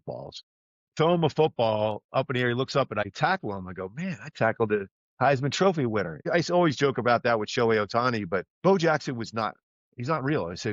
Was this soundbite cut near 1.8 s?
no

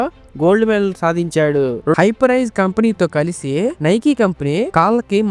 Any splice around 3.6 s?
no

